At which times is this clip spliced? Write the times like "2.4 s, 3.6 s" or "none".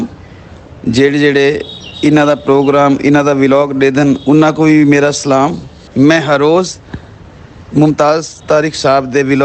5.8 s